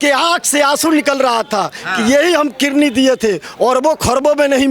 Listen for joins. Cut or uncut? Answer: uncut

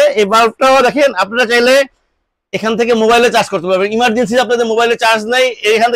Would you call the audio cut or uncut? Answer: uncut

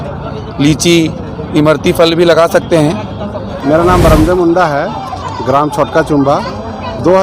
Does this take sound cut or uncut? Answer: cut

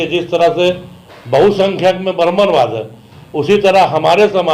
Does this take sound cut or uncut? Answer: uncut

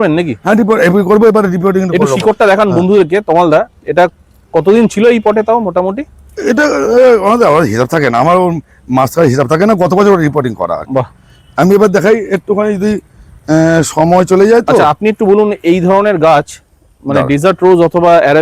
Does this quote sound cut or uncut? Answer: uncut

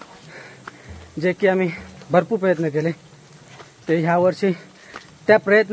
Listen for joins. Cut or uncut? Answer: uncut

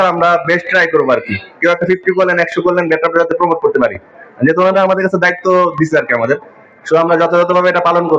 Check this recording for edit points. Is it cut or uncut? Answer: uncut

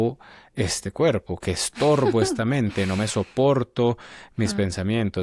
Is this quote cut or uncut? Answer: uncut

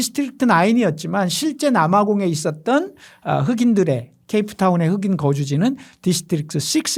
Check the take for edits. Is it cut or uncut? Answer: uncut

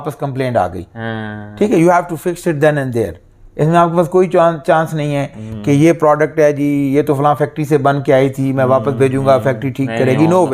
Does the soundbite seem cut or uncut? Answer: uncut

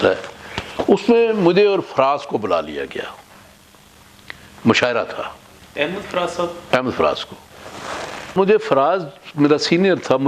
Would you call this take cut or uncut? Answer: cut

